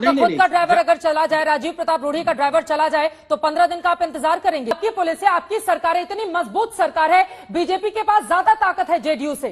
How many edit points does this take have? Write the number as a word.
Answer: one